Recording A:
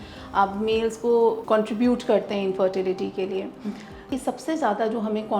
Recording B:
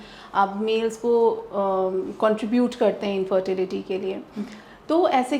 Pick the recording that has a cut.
A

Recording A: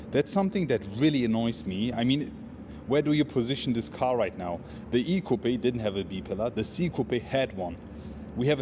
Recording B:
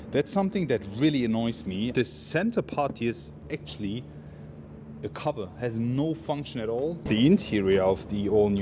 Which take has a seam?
B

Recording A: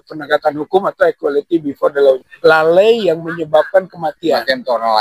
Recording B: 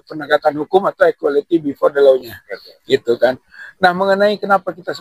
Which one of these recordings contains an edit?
A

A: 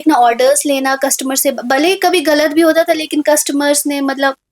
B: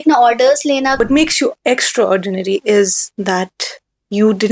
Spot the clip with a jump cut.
B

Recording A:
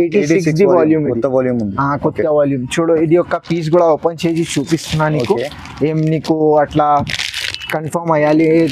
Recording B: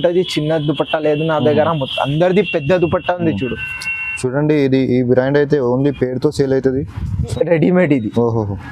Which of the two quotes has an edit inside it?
B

